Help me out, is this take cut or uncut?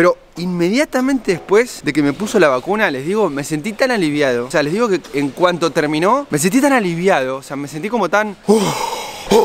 uncut